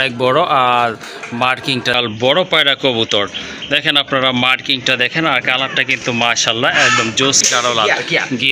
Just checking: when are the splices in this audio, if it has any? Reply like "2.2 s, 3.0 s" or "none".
1.9 s, 7.5 s